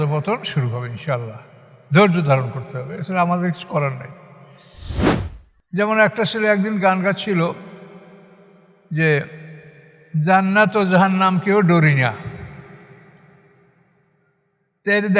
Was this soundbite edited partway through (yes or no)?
yes